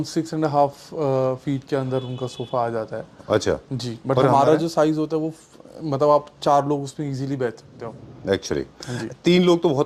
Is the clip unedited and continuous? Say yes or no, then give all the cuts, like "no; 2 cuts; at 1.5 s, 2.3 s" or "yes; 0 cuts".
yes; 0 cuts